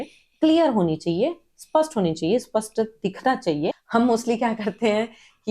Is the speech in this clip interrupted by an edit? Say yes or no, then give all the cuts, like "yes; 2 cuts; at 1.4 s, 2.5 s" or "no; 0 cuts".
yes; 1 cut; at 3.8 s